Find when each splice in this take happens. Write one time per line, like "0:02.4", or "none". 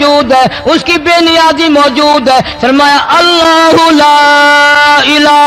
none